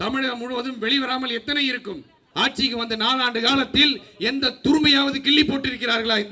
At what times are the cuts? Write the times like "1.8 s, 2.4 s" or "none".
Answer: 2.2 s